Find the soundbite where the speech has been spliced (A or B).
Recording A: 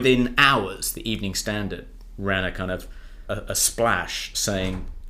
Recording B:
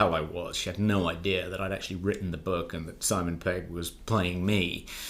A